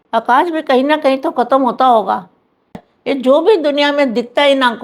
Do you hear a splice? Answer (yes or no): yes